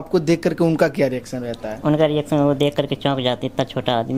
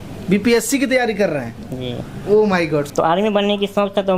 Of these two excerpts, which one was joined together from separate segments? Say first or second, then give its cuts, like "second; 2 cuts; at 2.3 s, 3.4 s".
second; 1 cut; at 2.9 s